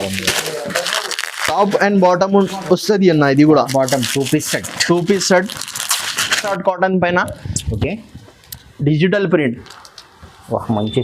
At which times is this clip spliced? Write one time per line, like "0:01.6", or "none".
0:06.4